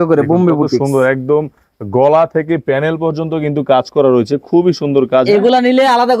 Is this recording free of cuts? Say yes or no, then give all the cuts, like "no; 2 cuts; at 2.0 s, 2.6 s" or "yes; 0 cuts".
yes; 0 cuts